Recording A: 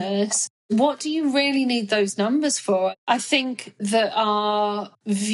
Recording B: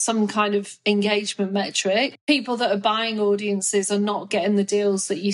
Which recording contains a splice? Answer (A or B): A